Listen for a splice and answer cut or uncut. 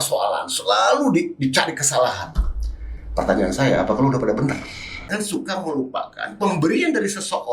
cut